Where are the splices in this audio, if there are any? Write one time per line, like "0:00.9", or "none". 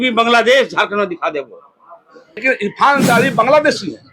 0:02.4